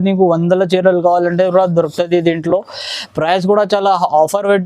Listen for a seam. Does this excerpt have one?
no; 0 cuts

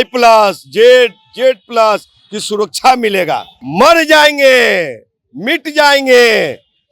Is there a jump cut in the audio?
yes; 1 cut; at 3.6 s

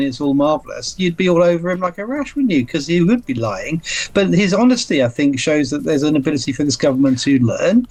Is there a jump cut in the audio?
no; 0 cuts

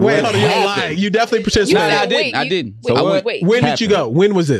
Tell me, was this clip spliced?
no; 0 cuts

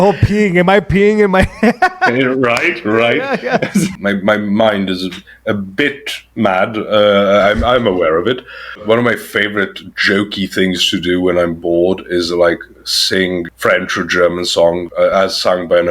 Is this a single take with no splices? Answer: no; 4 cuts; at 3.9 s, 8.8 s, 13.4 s, 14.8 s

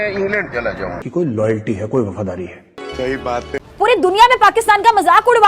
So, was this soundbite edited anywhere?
no; 0 cuts

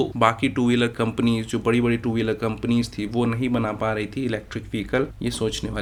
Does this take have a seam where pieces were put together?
no; 0 cuts

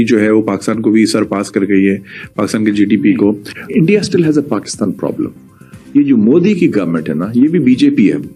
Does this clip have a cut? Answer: no; 0 cuts

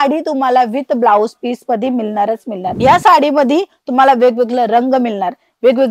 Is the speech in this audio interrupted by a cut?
yes; 1 cut; at 2.7 s

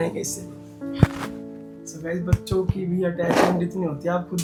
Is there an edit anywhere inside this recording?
no; 0 cuts

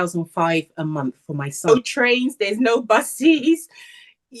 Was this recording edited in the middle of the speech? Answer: yes; 1 cut; at 1.7 s

